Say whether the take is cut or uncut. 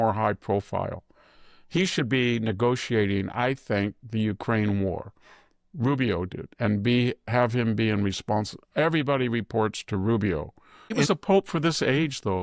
cut